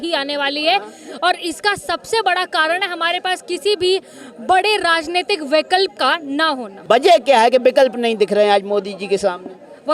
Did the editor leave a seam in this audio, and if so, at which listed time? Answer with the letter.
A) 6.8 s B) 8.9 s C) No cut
C